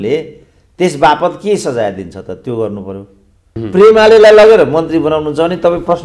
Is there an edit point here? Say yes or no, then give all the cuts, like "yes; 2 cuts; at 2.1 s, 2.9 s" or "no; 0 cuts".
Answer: yes; 1 cut; at 3.5 s